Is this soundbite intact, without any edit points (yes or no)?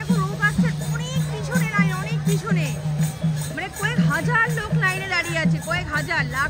yes